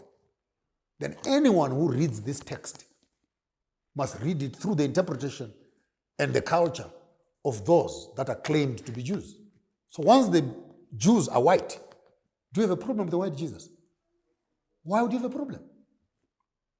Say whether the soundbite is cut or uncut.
uncut